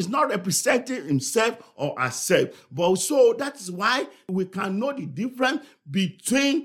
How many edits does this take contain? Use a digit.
1